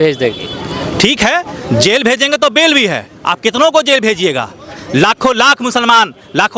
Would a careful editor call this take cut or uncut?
uncut